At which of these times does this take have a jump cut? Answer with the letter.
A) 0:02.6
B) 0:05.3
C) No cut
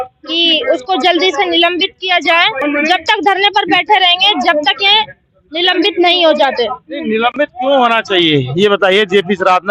A